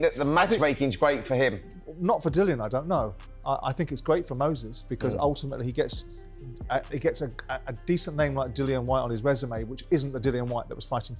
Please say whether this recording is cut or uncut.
uncut